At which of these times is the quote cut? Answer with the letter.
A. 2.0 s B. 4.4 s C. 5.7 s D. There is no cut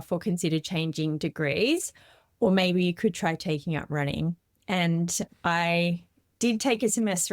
D